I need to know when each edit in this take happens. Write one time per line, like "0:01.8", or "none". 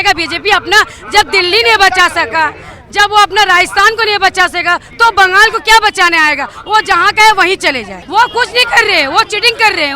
0:08.0